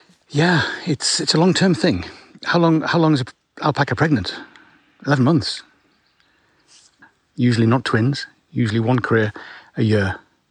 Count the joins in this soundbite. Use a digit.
1